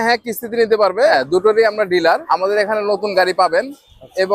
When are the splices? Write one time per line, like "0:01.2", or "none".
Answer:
0:01.1
0:02.2

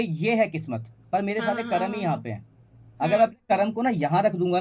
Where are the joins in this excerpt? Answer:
none

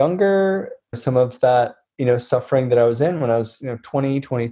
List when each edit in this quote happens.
0:01.0

